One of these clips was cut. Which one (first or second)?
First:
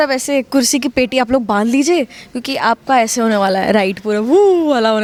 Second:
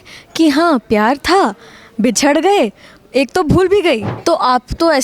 second